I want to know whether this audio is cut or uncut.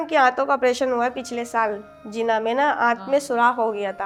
uncut